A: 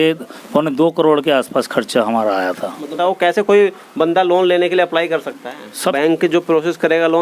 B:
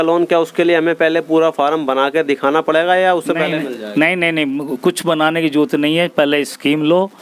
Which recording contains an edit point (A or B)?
A